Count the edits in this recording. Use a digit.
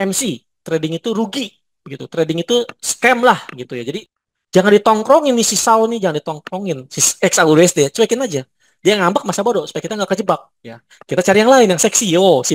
1